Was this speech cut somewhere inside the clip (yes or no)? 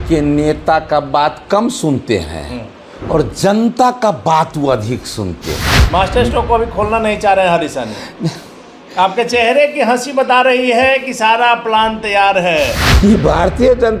yes